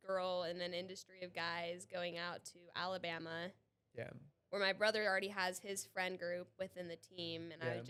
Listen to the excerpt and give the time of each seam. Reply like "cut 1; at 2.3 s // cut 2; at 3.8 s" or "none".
none